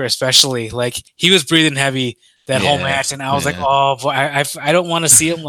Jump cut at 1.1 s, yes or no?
yes